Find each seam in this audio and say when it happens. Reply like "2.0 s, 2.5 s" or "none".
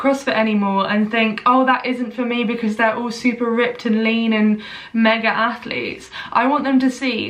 none